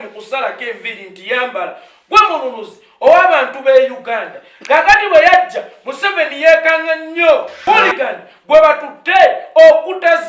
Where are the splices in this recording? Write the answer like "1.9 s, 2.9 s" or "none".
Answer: 7.5 s